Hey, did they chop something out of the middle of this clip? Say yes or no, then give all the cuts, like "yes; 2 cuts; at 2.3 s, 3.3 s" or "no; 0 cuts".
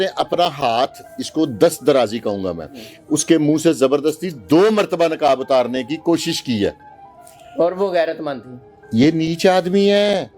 no; 0 cuts